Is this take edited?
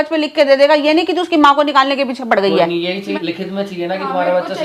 yes; 1 cut; at 3.0 s

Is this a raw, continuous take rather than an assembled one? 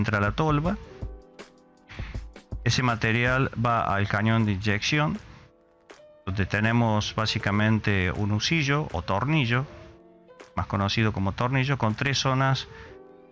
yes; 0 cuts

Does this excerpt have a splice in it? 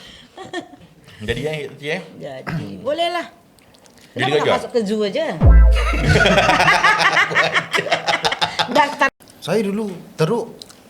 yes; 1 cut; at 9.1 s

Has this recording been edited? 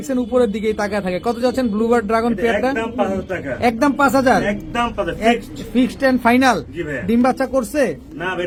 no; 0 cuts

